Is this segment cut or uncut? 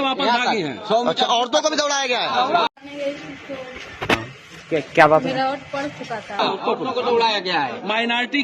cut